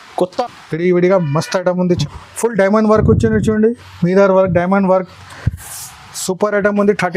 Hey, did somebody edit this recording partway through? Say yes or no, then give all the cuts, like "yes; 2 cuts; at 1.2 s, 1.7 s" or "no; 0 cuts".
yes; 1 cut; at 2.0 s